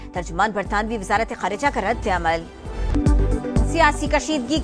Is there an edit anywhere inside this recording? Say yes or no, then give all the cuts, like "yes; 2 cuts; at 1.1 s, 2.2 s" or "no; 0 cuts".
yes; 1 cut; at 2.9 s